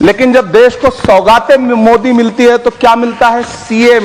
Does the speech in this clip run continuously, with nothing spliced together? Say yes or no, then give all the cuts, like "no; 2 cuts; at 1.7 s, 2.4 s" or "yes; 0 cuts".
yes; 0 cuts